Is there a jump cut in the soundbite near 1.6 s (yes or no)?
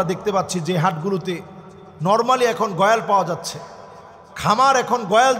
no